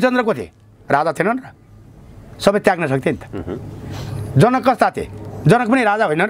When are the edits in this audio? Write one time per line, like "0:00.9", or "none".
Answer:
none